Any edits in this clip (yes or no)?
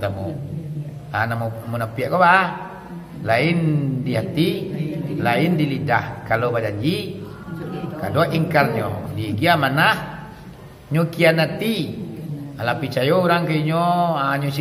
no